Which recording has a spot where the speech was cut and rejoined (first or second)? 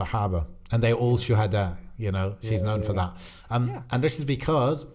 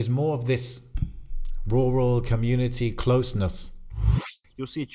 second